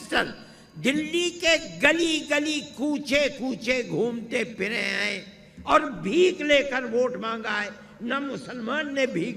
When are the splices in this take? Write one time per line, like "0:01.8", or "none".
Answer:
none